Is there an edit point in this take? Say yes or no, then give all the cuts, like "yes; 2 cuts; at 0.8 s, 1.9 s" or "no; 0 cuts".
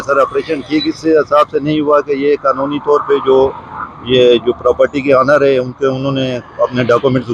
no; 0 cuts